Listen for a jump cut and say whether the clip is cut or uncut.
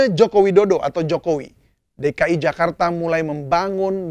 uncut